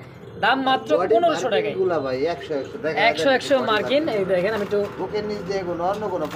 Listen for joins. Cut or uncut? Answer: uncut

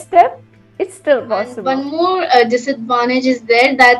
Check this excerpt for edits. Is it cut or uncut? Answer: cut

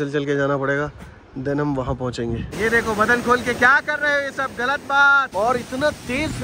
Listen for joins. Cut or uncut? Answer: cut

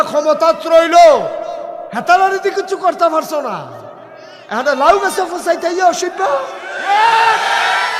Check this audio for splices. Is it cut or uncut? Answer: uncut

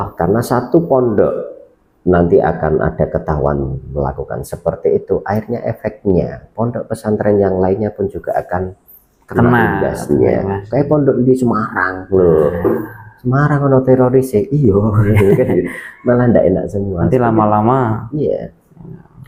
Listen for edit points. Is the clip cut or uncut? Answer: uncut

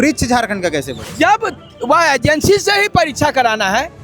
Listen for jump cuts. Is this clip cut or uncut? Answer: cut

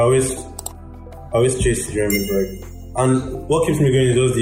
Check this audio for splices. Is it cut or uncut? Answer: uncut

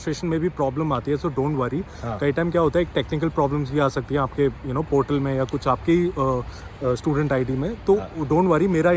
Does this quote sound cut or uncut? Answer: uncut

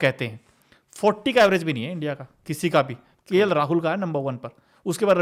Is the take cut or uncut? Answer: uncut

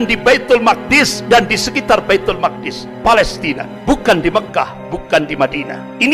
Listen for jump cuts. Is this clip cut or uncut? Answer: uncut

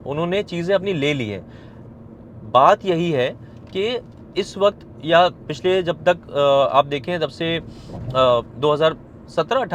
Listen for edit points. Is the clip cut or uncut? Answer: uncut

